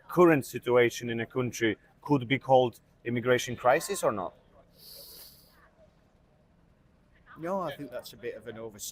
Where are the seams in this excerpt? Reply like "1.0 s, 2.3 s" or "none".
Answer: none